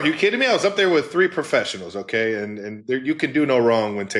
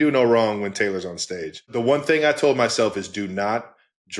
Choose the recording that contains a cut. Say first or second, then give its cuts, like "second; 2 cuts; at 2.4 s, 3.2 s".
second; 1 cut; at 1.8 s